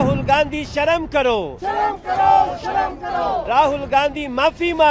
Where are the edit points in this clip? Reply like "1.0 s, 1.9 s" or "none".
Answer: 3.5 s